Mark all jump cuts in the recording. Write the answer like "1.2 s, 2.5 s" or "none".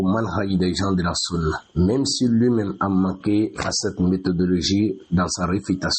2.0 s